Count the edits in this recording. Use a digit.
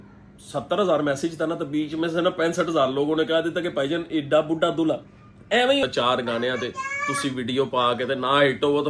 1